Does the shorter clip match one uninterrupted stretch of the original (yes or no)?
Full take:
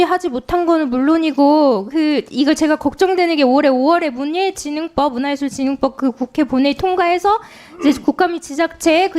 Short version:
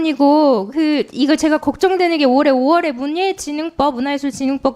yes